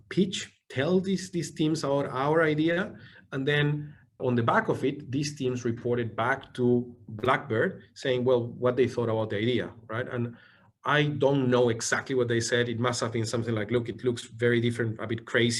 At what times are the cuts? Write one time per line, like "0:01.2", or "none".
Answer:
none